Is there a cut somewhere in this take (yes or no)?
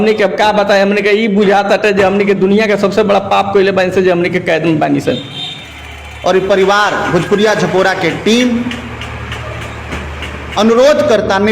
no